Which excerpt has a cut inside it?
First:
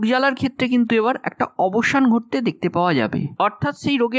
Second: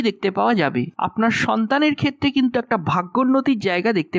second; 1 cut; at 0.9 s

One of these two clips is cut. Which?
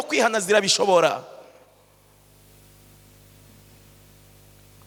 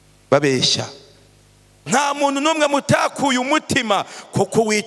second; 1 cut; at 1.7 s

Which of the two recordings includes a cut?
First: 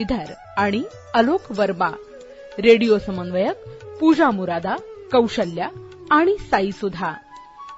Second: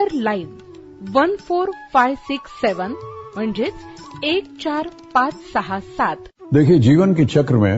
second; 1 cut; at 6.3 s

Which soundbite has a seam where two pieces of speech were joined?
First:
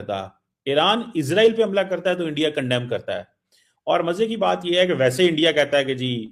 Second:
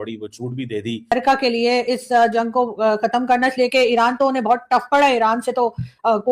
second; 1 cut; at 1.1 s

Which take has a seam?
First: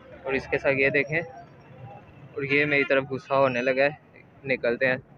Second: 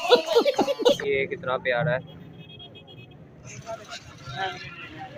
second; 2 cuts; at 1.0 s, 3.5 s

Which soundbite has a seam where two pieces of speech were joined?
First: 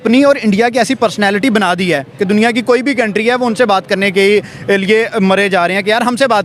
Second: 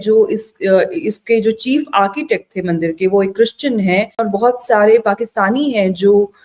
second; 1 cut; at 4.3 s

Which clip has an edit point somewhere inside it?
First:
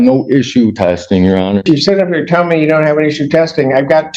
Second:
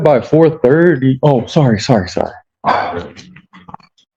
first; 1 cut; at 1.6 s

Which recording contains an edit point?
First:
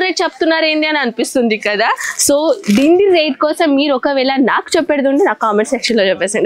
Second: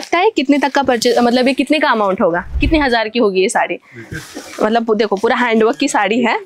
second; 1 cut; at 2.5 s

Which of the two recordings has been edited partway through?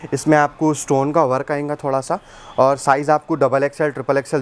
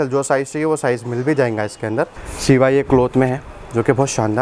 second; 1 cut; at 2.3 s

